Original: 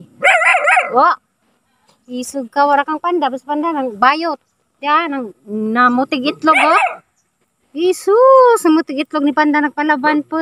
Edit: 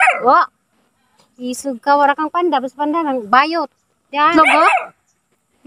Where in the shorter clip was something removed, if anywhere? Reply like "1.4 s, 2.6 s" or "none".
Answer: 4.3 s